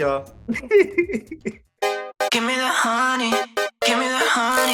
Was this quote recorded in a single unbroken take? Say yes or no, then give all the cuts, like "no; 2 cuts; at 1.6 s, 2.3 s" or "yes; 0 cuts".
yes; 0 cuts